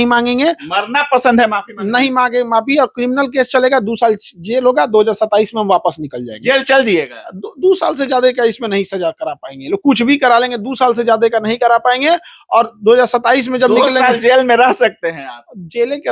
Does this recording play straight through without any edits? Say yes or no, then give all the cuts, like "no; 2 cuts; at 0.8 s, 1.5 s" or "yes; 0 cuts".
yes; 0 cuts